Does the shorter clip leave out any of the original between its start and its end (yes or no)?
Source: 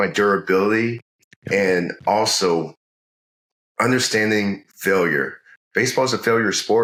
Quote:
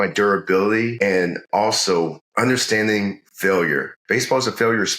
yes